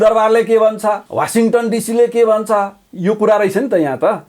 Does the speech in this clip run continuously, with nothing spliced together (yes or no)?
no